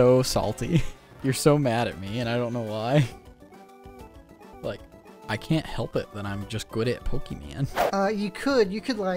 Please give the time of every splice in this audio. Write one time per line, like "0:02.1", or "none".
0:01.1
0:04.5
0:07.8